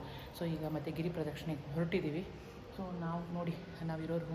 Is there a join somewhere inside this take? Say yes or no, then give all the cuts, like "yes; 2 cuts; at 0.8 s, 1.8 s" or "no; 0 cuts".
no; 0 cuts